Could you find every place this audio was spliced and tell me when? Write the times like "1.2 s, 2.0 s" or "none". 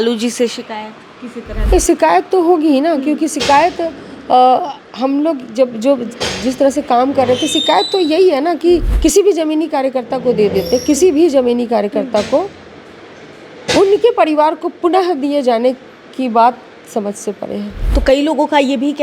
1.6 s, 8.9 s, 17.8 s